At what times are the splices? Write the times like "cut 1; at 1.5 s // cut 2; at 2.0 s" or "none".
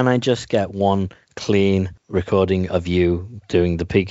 cut 1; at 2.0 s